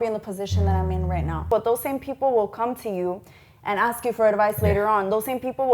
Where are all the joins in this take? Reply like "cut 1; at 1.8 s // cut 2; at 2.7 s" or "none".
cut 1; at 1.5 s